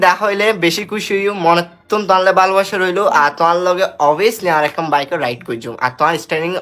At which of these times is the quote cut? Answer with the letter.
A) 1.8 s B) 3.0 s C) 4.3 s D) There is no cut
D